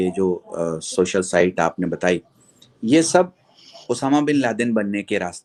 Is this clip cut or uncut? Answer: uncut